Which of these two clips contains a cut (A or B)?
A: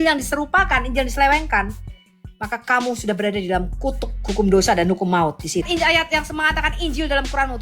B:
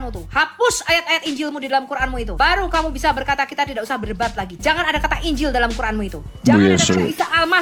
A